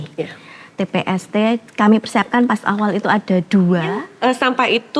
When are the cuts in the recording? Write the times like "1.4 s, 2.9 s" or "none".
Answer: 4.1 s